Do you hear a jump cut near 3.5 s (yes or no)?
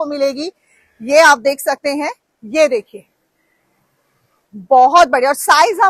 no